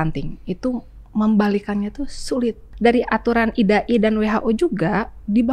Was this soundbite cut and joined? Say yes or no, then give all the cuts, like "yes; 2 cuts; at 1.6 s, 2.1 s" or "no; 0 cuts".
yes; 1 cut; at 2.6 s